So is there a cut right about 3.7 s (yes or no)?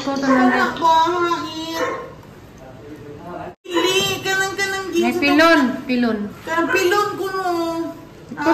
yes